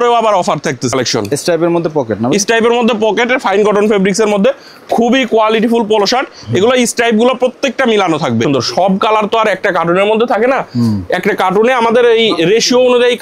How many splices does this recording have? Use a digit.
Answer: 2